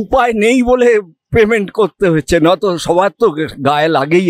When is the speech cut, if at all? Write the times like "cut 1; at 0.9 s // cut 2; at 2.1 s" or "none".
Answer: none